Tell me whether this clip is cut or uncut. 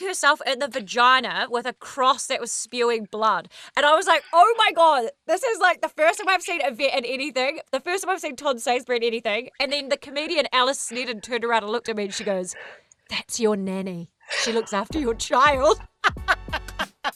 uncut